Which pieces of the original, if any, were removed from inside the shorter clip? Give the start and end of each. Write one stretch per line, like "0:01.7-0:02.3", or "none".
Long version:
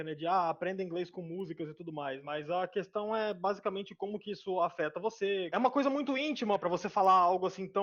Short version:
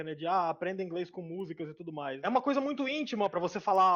0:02.2-0:05.5